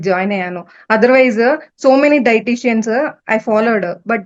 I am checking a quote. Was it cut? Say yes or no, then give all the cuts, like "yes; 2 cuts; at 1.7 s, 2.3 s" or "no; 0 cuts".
no; 0 cuts